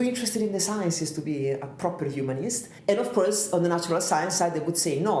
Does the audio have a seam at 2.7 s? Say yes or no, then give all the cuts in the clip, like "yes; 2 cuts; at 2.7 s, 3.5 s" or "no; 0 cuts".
yes; 1 cut; at 2.7 s